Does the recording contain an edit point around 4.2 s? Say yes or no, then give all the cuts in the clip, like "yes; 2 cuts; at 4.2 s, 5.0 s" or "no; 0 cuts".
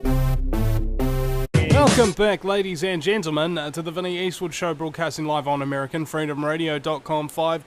no; 1 cut; at 1.5 s